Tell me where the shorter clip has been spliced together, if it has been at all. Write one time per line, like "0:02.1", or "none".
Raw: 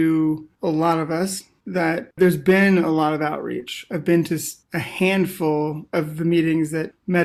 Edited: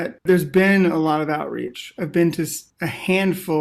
none